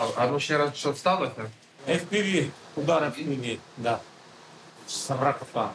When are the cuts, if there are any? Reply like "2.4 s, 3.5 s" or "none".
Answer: 1.7 s, 5.0 s